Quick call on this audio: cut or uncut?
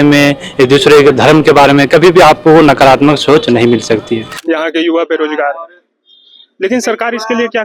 cut